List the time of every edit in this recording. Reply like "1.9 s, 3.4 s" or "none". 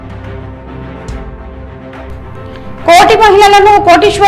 1.1 s, 2.8 s